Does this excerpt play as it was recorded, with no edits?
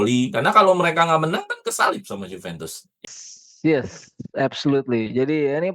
no; 1 cut; at 3.0 s

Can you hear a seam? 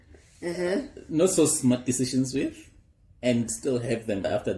no; 0 cuts

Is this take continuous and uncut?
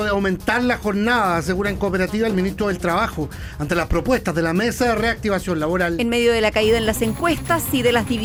yes; 0 cuts

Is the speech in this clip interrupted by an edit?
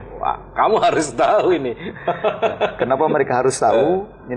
no; 0 cuts

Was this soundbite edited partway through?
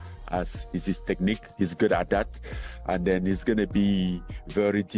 no; 0 cuts

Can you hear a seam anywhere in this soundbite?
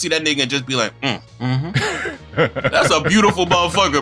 yes; 2 cuts; at 1.5 s, 2.7 s

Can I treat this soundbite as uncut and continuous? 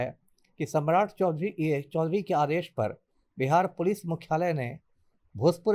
yes; 0 cuts

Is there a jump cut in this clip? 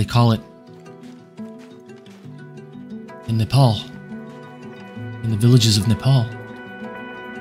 no; 0 cuts

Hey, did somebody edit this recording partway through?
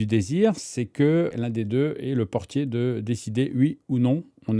yes; 1 cut; at 1.3 s

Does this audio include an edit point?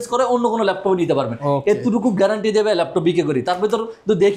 no; 0 cuts

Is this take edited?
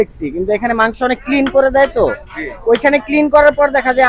no; 0 cuts

